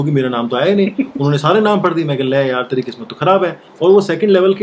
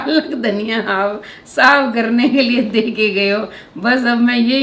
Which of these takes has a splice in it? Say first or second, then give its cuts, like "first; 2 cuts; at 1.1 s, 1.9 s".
first; 1 cut; at 3.7 s